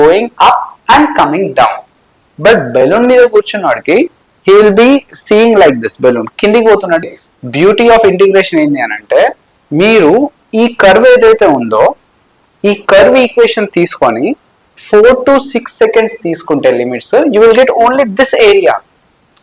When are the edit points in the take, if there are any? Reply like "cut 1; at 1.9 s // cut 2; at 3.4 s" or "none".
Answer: cut 1; at 7.0 s